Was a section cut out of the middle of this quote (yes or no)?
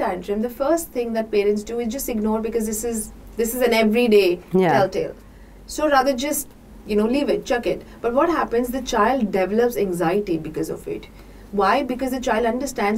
no